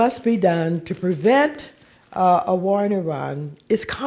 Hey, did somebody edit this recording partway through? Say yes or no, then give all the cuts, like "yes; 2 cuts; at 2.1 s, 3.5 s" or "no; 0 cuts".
no; 0 cuts